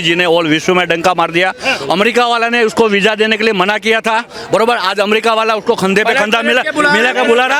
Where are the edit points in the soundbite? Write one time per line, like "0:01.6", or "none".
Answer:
none